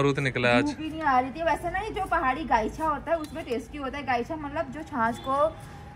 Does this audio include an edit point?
no; 0 cuts

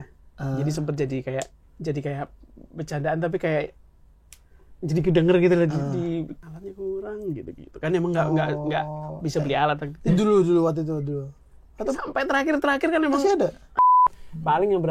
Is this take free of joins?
no; 2 cuts; at 6.4 s, 14.0 s

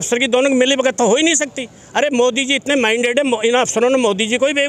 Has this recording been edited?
no; 0 cuts

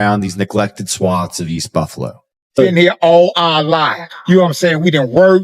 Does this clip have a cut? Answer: yes; 1 cut; at 2.6 s

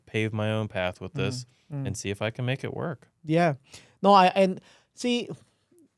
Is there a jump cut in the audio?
no; 0 cuts

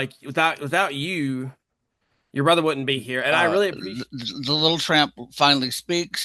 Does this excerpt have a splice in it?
yes; 1 cut; at 3.8 s

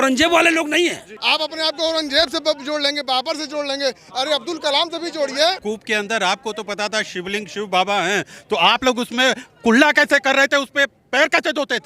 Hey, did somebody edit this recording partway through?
yes; 2 cuts; at 1.1 s, 5.6 s

